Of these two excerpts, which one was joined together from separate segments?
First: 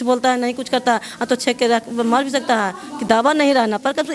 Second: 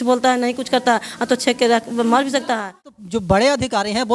second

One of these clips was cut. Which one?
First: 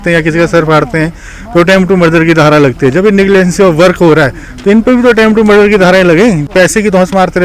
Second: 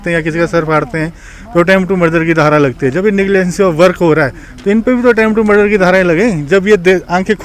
first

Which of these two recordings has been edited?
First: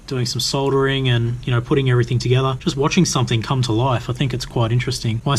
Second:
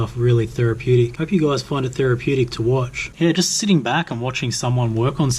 second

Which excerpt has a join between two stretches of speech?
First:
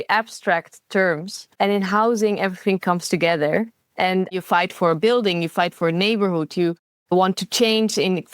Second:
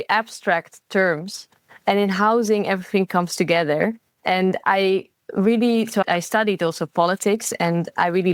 first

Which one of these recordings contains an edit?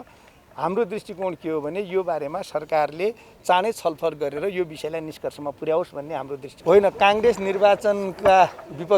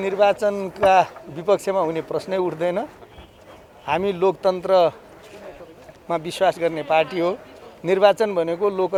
first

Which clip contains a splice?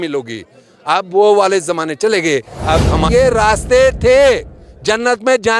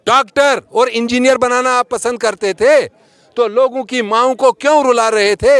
first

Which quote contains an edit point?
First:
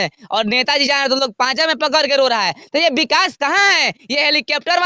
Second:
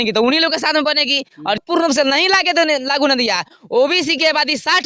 second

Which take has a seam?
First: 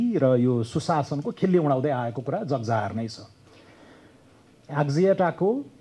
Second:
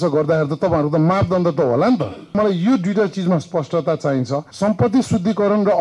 second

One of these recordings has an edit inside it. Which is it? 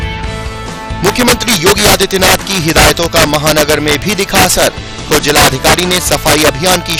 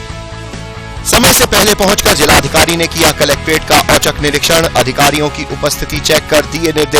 second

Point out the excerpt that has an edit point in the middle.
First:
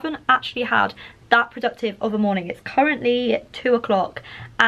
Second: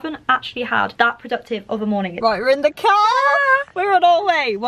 second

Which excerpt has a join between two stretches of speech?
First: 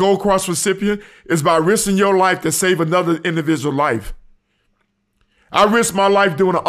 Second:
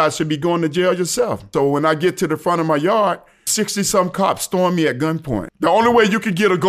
second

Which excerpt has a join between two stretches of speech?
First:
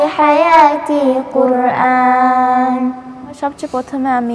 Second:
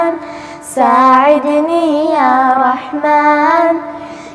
first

